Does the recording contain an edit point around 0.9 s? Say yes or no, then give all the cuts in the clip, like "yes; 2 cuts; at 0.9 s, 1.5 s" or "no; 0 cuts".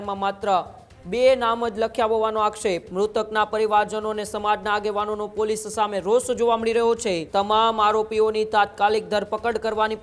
no; 2 cuts; at 2.9 s, 7.2 s